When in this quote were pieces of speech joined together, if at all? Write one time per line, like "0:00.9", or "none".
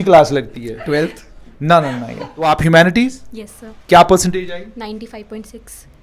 0:02.4